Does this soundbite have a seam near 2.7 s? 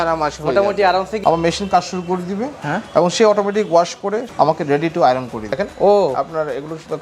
no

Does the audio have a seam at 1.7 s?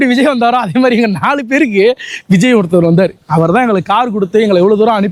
no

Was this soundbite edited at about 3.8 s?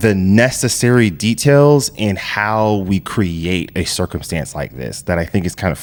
no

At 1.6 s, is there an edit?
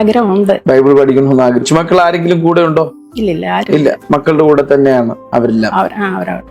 yes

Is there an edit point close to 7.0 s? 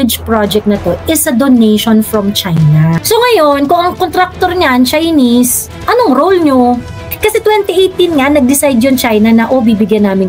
yes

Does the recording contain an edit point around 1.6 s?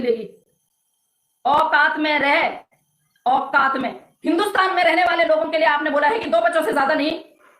no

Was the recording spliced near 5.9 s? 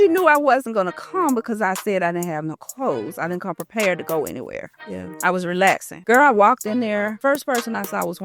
yes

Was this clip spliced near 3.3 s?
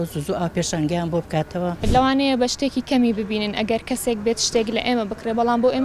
no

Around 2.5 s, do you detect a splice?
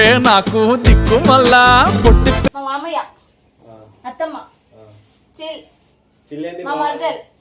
yes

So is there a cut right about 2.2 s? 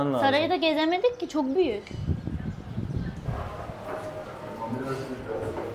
no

